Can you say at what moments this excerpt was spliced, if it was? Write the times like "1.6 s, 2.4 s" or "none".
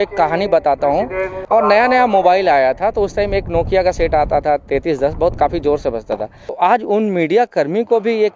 1.4 s, 6.4 s